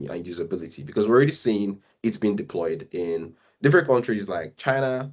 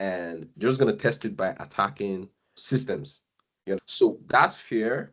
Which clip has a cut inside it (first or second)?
second